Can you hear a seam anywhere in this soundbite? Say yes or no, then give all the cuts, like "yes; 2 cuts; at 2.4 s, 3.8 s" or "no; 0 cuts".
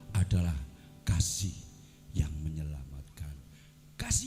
no; 0 cuts